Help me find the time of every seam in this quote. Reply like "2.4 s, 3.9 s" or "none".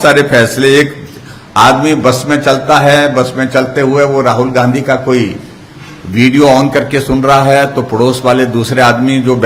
none